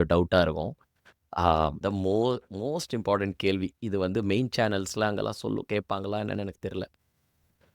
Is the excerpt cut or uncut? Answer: cut